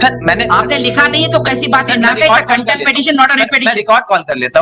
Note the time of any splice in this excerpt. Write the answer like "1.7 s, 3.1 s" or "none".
none